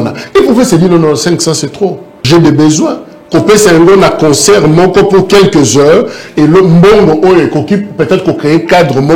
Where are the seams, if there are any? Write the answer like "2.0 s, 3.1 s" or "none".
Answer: 2.1 s